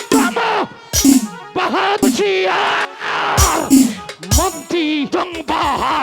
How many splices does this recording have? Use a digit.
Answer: 2